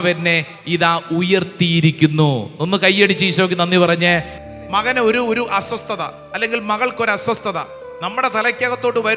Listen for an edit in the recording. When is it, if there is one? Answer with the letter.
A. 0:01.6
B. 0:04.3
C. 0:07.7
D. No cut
B